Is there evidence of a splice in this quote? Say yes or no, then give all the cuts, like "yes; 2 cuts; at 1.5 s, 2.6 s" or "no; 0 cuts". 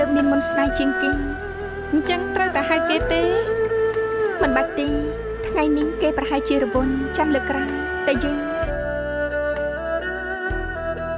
no; 0 cuts